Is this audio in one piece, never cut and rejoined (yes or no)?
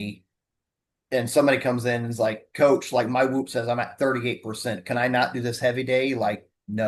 yes